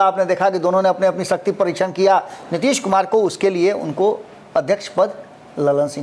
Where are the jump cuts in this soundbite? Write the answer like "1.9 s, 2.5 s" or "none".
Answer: none